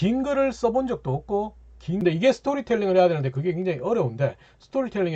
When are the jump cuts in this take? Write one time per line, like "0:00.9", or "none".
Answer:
0:02.0

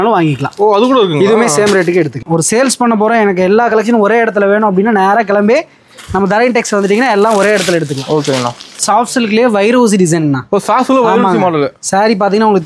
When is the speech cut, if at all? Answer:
0:02.2
0:08.8

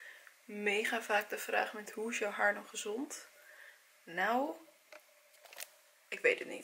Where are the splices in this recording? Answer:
none

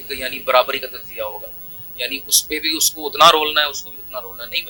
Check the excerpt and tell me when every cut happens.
none

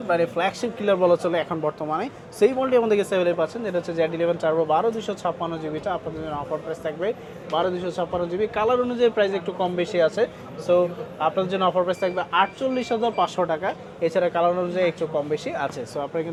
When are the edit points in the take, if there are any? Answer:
none

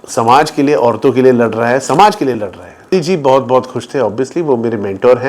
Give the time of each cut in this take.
0:02.9

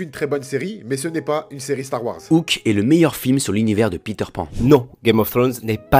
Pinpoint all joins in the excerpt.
0:02.3
0:04.5

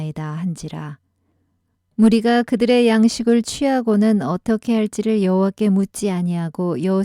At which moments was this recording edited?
0:01.4

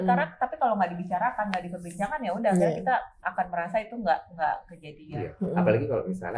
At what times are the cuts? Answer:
none

